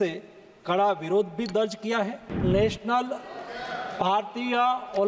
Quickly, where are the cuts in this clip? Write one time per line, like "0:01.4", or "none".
0:02.3